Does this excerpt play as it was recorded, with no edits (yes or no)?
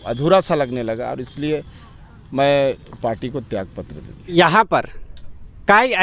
no